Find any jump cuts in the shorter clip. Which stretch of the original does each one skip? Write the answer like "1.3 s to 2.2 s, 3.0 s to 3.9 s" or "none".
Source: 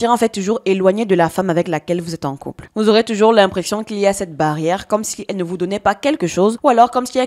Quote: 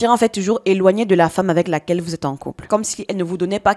2.6 s to 4.8 s